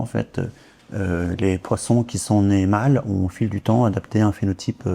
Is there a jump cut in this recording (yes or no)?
no